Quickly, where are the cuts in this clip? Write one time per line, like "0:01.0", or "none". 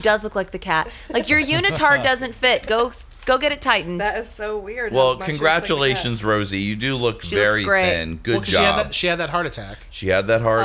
none